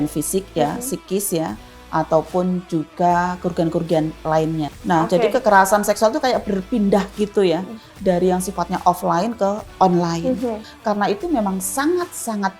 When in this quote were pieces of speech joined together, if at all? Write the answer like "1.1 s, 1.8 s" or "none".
4.8 s, 10.7 s